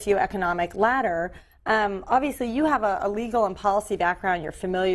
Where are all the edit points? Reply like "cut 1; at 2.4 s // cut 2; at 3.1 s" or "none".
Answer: cut 1; at 1.4 s